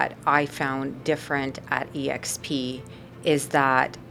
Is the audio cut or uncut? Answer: uncut